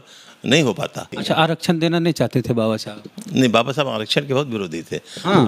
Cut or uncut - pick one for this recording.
cut